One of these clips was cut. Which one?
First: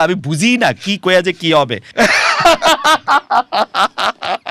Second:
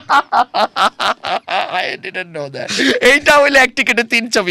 first; 1 cut; at 1.8 s

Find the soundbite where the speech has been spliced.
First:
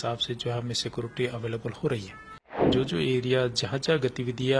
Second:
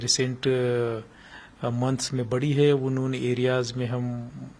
first; 1 cut; at 2.7 s

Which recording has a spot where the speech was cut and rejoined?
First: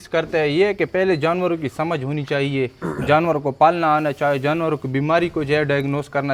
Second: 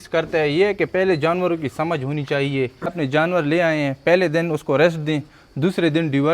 second; 1 cut; at 2.9 s

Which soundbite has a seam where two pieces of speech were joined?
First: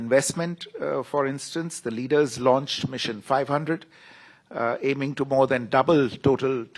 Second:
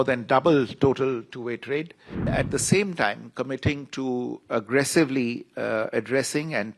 second; 1 cut; at 2.3 s

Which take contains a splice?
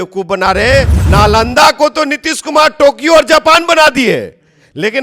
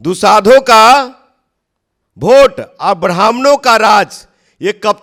first; 1 cut; at 1.0 s

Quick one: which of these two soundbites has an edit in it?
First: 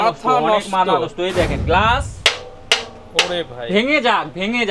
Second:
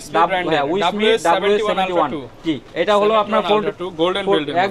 first; 1 cut; at 1.6 s

